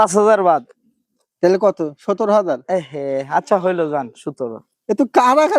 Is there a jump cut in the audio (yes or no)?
no